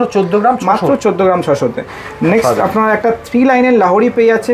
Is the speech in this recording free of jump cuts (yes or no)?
yes